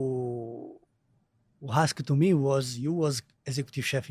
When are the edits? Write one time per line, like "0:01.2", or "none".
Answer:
none